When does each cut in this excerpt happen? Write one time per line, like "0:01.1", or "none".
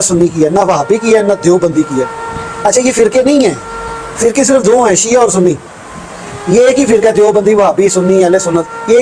none